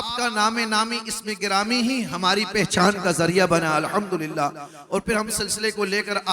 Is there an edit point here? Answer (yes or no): no